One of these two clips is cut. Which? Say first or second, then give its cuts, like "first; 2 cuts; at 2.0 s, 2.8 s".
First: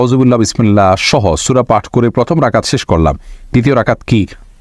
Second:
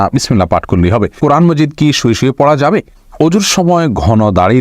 second; 2 cuts; at 1.2 s, 3.0 s